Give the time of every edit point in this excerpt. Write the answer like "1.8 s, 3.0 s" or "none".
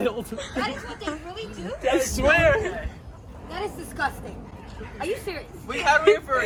none